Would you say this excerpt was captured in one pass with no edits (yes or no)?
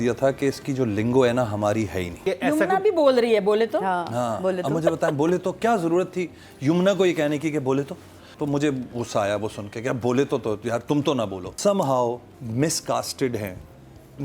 no